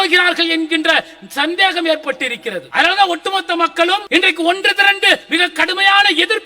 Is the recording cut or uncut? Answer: cut